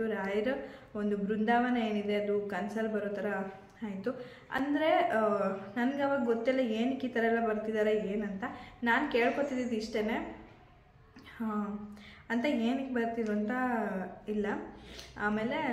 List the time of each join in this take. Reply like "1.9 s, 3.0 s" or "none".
none